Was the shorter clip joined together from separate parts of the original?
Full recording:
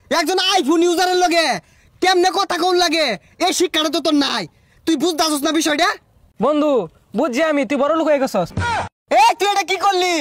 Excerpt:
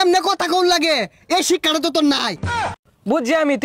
yes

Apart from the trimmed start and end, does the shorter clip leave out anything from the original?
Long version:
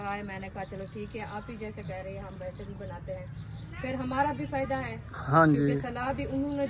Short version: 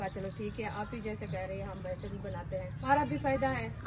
yes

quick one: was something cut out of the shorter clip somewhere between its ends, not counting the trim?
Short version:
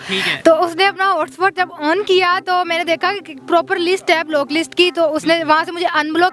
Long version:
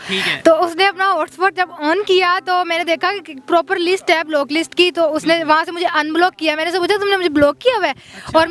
no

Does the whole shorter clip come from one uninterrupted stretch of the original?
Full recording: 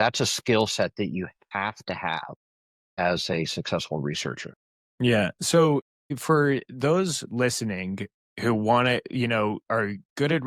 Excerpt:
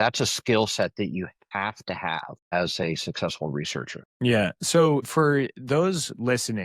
no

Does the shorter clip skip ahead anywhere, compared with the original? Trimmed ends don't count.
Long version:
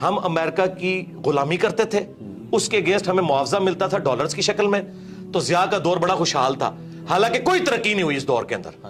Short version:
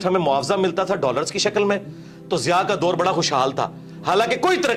no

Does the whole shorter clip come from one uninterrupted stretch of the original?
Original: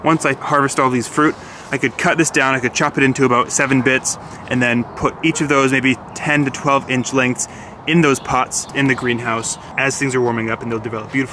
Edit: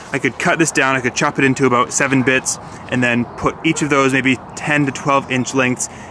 yes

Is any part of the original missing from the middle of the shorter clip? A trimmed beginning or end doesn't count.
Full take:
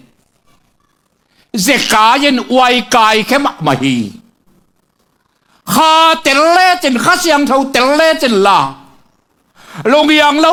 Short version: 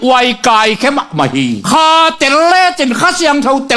yes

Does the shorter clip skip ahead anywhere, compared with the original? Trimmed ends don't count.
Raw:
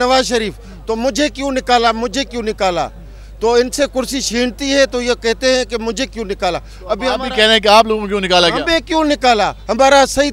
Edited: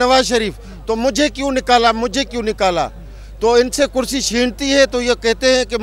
no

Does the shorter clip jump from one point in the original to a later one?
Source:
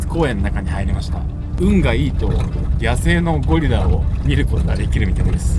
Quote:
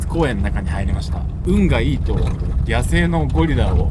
yes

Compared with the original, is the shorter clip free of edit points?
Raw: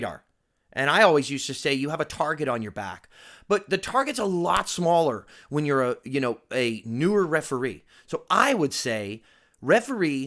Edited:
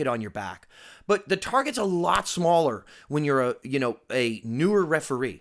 yes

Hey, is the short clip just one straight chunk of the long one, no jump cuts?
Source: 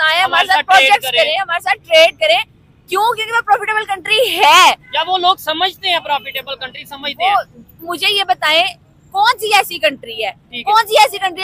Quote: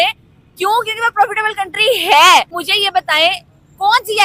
no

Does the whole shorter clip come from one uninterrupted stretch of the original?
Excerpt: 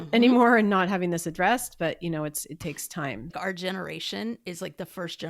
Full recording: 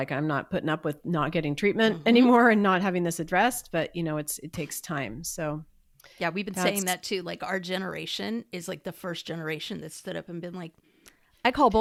no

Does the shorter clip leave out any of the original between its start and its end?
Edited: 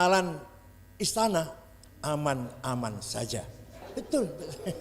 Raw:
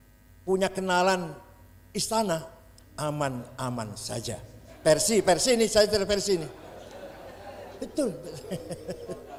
yes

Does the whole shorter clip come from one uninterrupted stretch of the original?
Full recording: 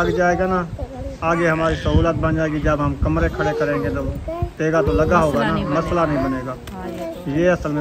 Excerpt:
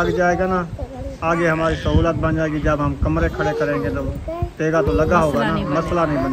yes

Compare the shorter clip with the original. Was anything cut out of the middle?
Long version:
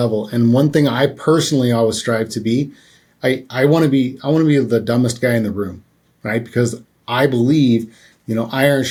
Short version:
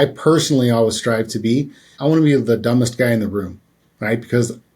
yes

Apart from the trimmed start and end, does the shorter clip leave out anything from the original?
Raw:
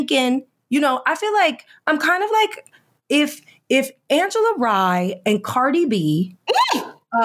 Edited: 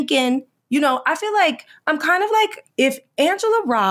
yes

